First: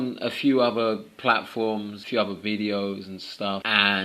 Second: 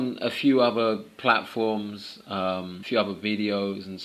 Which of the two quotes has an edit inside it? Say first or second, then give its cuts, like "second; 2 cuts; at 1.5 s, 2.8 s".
first; 1 cut; at 2.0 s